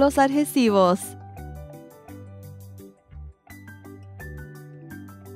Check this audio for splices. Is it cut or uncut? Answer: cut